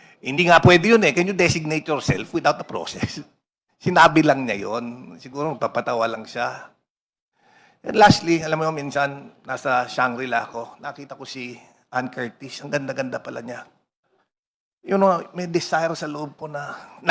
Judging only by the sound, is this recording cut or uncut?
uncut